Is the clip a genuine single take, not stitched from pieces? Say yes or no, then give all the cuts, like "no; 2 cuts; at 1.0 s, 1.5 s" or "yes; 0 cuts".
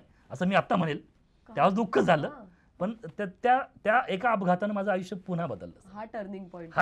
yes; 0 cuts